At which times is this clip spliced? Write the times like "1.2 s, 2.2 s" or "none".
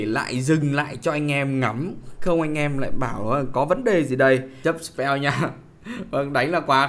4.5 s